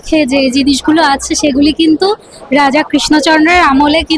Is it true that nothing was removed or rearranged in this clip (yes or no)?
yes